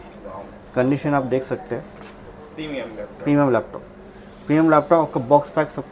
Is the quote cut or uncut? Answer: uncut